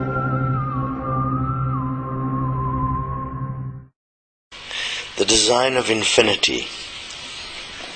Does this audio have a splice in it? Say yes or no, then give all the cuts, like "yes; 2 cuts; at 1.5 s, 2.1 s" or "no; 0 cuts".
no; 0 cuts